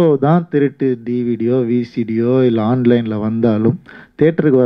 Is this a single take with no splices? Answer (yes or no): yes